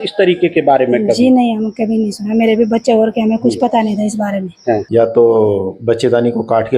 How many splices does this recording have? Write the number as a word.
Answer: one